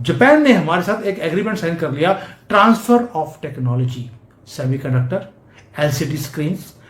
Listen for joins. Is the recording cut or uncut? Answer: uncut